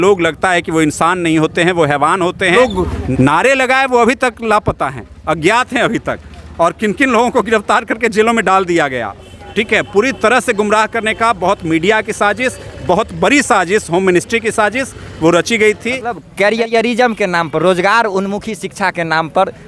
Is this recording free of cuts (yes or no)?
no